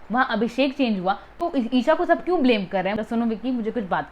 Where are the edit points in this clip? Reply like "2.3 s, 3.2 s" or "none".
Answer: 2.9 s